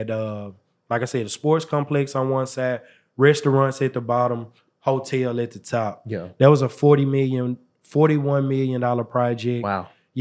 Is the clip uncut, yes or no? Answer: yes